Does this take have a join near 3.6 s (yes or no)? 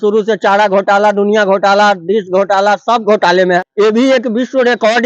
yes